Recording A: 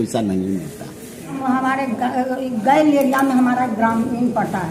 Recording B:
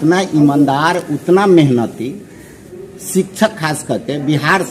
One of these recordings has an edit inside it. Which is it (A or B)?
A